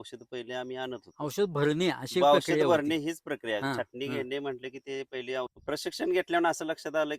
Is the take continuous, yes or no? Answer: no